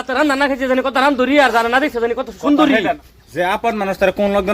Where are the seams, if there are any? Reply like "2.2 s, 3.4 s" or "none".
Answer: 3.0 s